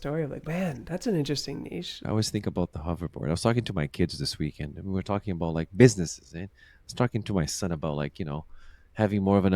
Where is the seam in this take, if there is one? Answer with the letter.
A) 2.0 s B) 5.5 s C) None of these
A